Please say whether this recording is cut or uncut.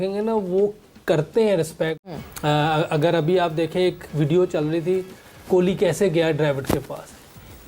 cut